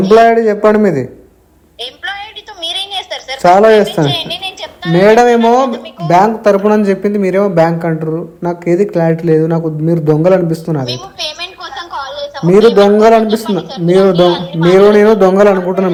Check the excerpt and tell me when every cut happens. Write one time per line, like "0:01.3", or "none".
none